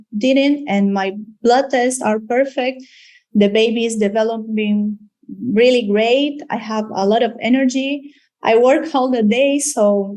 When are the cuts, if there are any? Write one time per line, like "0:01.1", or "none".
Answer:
none